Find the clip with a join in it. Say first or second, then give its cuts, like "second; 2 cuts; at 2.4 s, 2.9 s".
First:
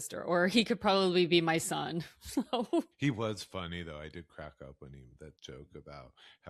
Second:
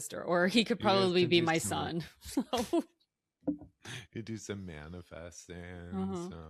first; 1 cut; at 2.9 s